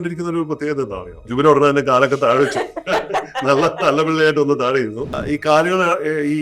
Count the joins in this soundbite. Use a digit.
2